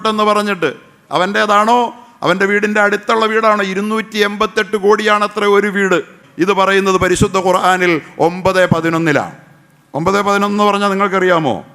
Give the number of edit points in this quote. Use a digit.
1